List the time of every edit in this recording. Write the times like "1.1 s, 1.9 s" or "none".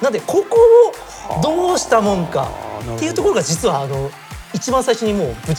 none